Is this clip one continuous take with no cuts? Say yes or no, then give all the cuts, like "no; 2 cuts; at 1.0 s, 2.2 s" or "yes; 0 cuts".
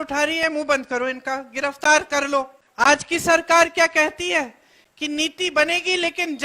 no; 1 cut; at 2.6 s